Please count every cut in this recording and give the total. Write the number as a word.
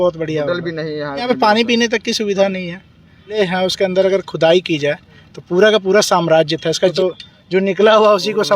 three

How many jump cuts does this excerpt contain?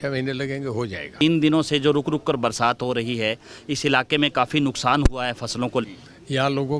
two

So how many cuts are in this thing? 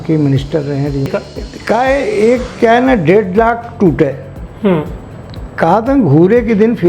one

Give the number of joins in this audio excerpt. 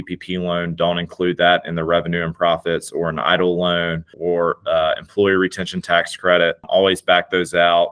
two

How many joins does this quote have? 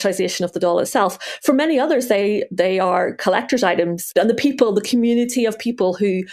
one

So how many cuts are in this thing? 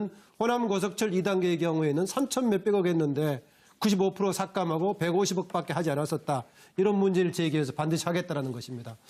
one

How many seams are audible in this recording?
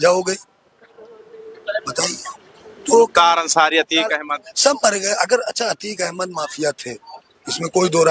zero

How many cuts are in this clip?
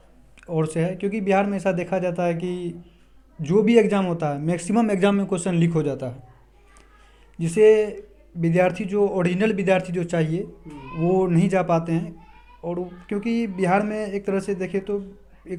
zero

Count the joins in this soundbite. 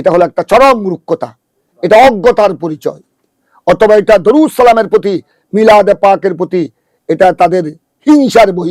zero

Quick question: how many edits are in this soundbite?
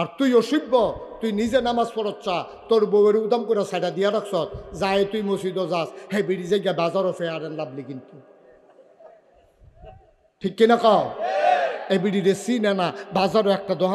zero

